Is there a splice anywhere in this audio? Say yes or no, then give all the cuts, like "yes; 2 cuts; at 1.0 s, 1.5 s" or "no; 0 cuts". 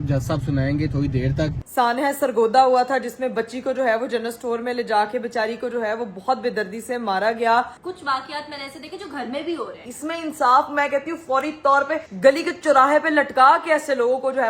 yes; 3 cuts; at 1.6 s, 7.8 s, 9.8 s